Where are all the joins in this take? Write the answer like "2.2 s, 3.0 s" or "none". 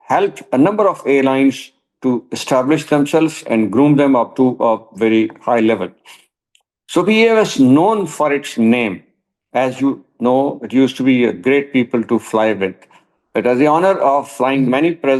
none